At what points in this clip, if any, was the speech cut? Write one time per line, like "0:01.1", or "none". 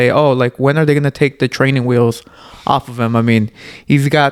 none